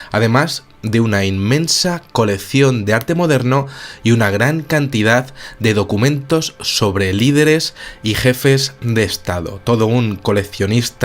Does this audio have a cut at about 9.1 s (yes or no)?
no